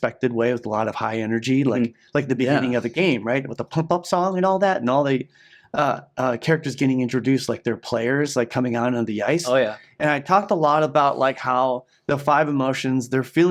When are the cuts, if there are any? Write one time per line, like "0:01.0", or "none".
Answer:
none

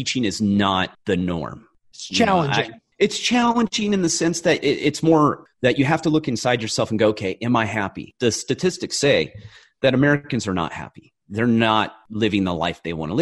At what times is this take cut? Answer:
0:01.0
0:05.5
0:12.0

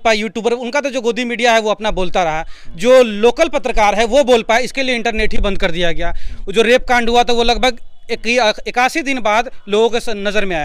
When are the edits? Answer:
none

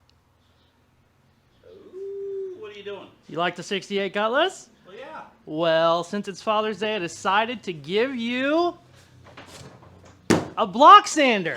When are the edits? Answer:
0:01.5

